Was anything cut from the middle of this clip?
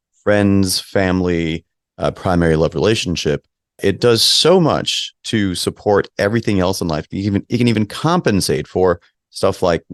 no; 0 cuts

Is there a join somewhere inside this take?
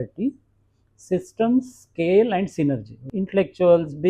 yes; 1 cut; at 3.0 s

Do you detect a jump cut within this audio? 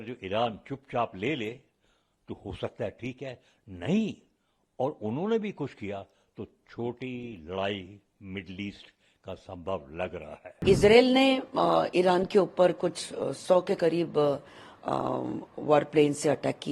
no; 0 cuts

